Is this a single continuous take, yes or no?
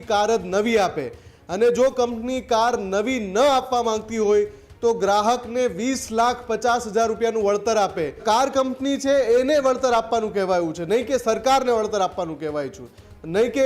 no